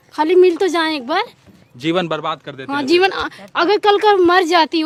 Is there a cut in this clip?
no; 0 cuts

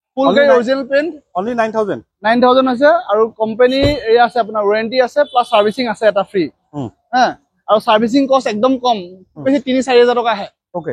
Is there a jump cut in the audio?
no; 0 cuts

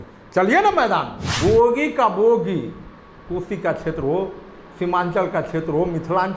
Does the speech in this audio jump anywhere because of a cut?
yes; 1 cut; at 1.2 s

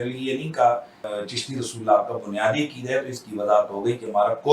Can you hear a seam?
yes; 1 cut; at 1.0 s

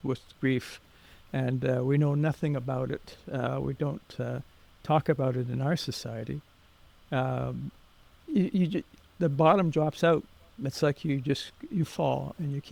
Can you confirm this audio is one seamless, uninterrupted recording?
yes; 0 cuts

